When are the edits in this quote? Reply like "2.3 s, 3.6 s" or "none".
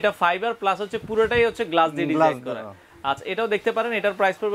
none